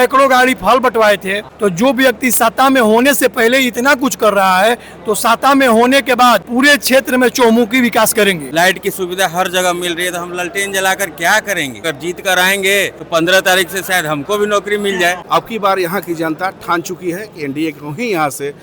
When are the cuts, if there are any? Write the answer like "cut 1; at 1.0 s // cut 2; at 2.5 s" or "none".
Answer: cut 1; at 1.4 s // cut 2; at 6.5 s // cut 3; at 8.4 s // cut 4; at 11.8 s // cut 5; at 13.0 s // cut 6; at 15.2 s